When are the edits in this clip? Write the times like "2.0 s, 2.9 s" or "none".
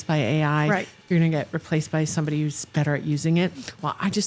none